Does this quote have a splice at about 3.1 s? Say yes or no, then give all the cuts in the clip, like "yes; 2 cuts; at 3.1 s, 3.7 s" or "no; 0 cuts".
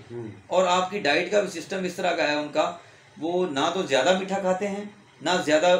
no; 0 cuts